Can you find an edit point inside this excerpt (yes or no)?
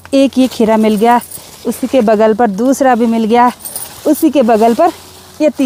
no